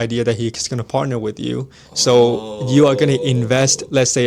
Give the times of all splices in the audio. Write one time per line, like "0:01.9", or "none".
none